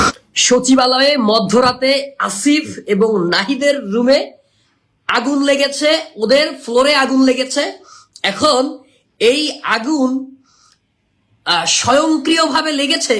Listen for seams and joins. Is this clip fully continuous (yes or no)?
yes